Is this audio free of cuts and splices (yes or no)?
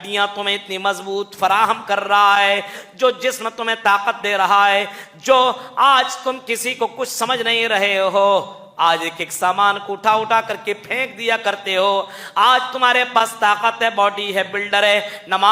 yes